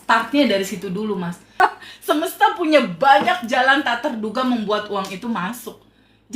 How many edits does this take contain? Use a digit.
1